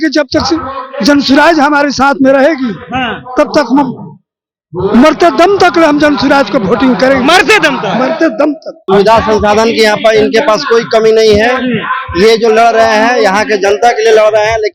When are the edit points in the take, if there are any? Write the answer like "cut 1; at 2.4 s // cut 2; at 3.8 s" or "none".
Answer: cut 1; at 8.8 s